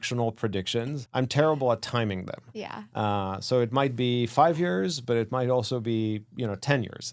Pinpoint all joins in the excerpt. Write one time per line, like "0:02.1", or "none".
0:01.0